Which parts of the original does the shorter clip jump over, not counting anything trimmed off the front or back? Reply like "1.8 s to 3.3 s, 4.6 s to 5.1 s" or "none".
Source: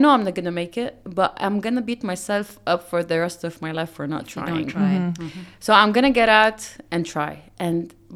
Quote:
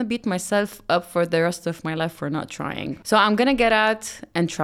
4.4 s to 5.2 s